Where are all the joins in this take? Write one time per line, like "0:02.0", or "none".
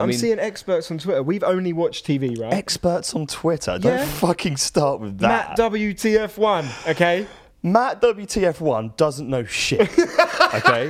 none